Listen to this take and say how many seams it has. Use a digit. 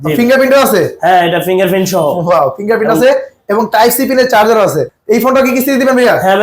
1